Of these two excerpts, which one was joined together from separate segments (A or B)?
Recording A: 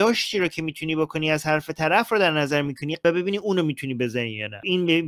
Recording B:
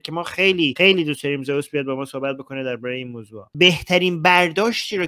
B